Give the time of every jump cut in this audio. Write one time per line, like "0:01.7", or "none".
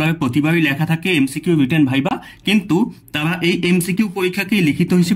none